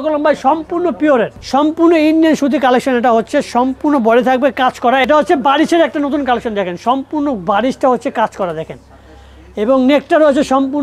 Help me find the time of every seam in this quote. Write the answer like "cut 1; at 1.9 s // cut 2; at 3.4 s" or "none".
cut 1; at 1.4 s // cut 2; at 5.0 s